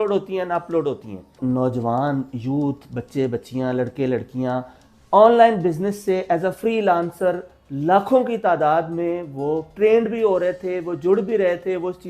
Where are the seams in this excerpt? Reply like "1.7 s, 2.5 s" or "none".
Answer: 1.4 s